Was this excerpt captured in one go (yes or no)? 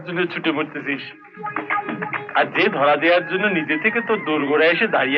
yes